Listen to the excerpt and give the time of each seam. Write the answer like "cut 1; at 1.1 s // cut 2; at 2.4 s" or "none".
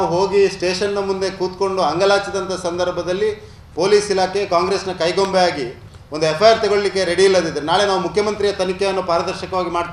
none